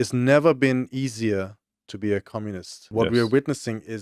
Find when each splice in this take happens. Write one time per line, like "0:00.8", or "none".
0:02.9